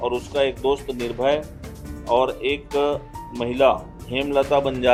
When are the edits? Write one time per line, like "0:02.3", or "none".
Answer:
none